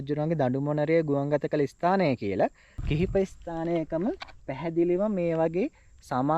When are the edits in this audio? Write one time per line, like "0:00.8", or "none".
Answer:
0:02.7